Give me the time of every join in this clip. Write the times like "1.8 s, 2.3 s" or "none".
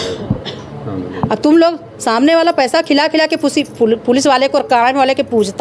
none